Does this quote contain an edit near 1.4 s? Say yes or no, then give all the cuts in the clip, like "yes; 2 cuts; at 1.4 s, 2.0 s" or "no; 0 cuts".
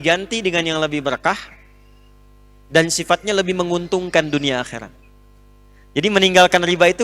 no; 0 cuts